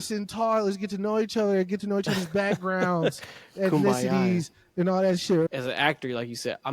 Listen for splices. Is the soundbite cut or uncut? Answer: cut